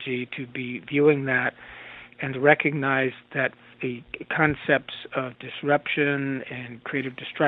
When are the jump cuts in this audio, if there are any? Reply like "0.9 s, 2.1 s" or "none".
3.7 s